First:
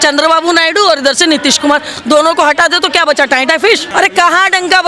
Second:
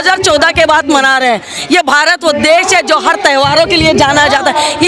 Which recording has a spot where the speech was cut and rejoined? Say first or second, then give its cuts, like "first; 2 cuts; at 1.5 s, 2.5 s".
first; 1 cut; at 3.9 s